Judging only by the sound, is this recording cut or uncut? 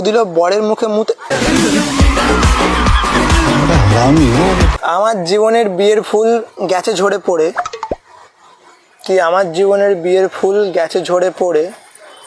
cut